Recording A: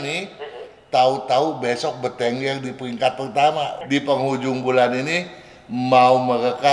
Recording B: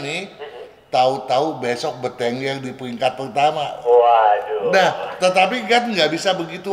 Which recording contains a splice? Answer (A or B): A